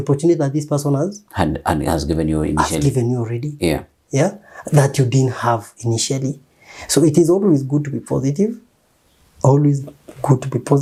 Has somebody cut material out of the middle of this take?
no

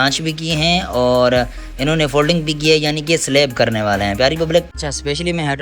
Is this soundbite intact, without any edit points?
no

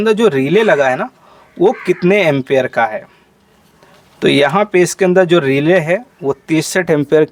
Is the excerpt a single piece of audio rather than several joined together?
yes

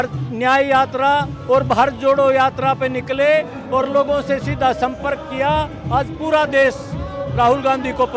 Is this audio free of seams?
yes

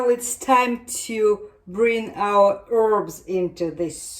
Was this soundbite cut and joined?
no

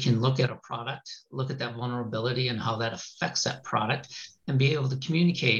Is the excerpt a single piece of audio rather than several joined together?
yes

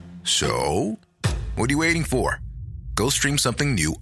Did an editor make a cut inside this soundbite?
no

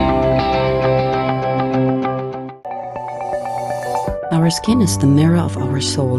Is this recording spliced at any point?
no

